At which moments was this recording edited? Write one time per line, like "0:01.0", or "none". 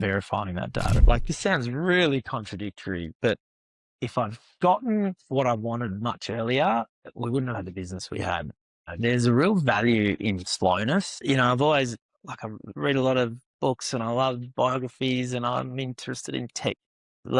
0:01.0